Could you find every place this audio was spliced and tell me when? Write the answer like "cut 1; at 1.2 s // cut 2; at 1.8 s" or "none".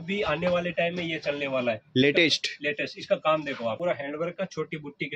cut 1; at 3.8 s